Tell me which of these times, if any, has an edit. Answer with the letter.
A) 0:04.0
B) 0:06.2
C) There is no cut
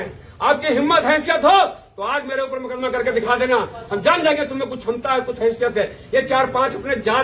C